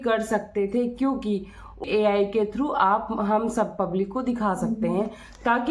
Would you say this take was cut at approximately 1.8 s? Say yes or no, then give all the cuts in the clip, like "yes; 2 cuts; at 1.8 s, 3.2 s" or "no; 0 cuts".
yes; 1 cut; at 1.8 s